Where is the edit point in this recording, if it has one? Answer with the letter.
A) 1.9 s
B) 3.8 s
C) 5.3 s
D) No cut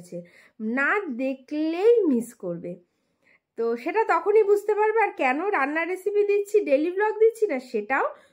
D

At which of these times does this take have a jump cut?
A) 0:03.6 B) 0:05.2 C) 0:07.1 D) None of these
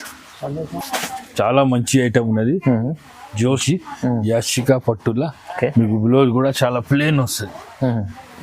A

